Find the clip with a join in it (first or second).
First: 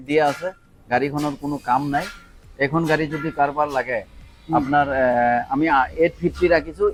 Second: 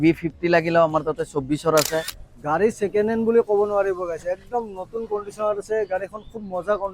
second